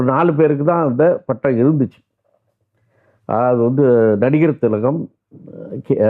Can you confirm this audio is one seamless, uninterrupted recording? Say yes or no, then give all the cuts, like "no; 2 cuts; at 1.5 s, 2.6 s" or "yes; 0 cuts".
yes; 0 cuts